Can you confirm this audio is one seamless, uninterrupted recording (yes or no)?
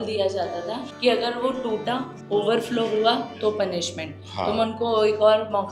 yes